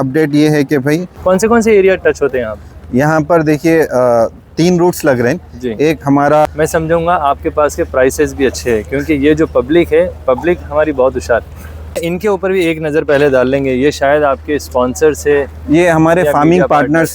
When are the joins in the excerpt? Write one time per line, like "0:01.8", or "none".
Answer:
0:01.1
0:06.5
0:12.0

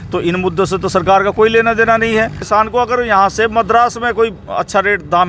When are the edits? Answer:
0:02.4

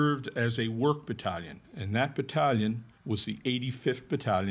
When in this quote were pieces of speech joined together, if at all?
0:01.6

